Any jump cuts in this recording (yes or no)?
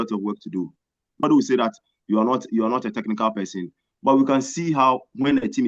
yes